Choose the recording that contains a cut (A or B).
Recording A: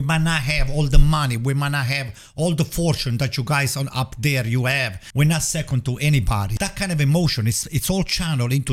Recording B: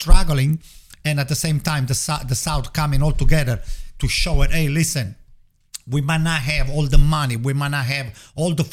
A